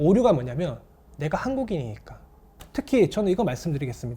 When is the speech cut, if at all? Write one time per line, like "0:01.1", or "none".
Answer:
0:02.5